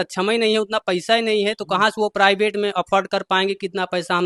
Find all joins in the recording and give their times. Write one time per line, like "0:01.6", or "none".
none